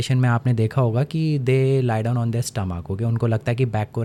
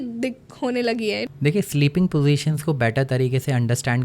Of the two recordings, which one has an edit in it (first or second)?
second